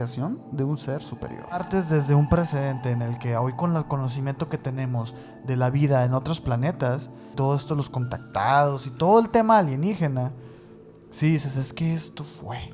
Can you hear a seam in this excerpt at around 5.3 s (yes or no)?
no